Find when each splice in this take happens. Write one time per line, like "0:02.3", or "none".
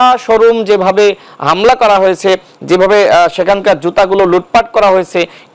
none